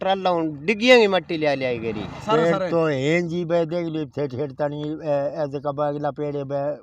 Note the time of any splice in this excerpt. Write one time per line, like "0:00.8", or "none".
0:02.2